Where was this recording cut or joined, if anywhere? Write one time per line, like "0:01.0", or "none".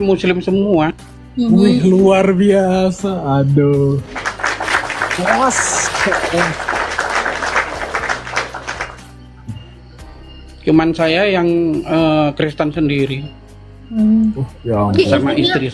none